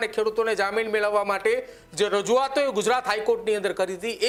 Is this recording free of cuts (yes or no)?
yes